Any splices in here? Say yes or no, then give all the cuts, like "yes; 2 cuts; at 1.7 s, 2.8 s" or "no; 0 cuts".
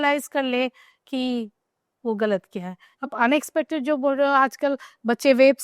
yes; 1 cut; at 3.0 s